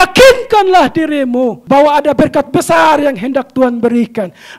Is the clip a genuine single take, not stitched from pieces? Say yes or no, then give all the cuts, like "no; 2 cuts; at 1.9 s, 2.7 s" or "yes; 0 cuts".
no; 1 cut; at 1.6 s